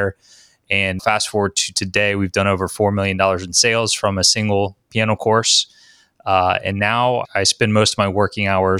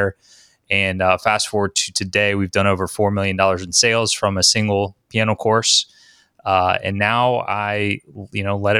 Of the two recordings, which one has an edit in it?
first; 2 cuts; at 1.0 s, 7.3 s

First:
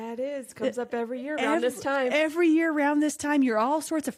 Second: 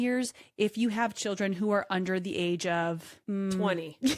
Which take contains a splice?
second; 1 cut; at 3.1 s

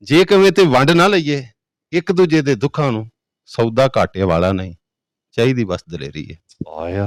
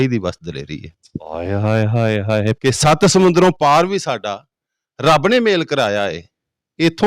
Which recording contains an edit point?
second; 1 cut; at 2.6 s

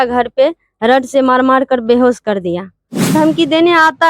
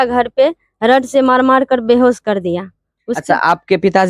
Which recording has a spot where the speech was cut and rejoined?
first; 1 cut; at 3.1 s

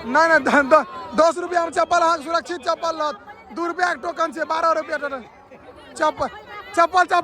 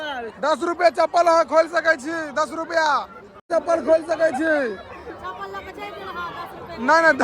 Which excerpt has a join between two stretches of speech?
second; 1 cut; at 3.4 s

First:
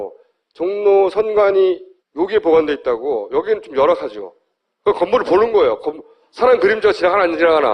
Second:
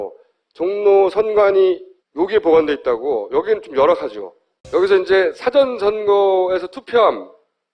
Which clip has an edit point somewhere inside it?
first; 1 cut; at 4.5 s

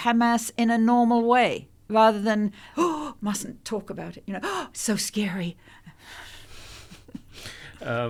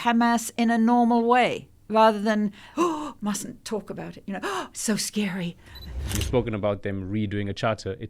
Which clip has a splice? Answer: second; 1 cut; at 6.2 s

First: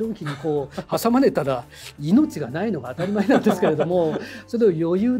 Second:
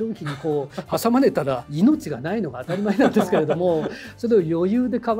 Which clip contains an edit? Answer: second; 1 cut; at 1.7 s

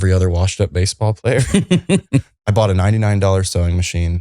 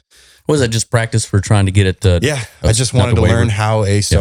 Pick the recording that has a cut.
first; 1 cut; at 2.3 s

